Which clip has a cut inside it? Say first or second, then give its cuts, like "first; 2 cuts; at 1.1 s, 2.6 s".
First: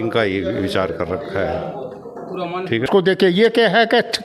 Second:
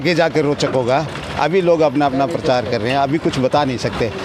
first; 1 cut; at 2.9 s